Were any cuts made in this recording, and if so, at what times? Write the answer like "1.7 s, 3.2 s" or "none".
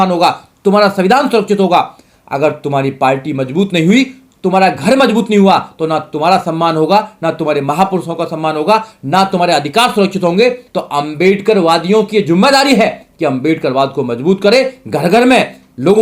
10.7 s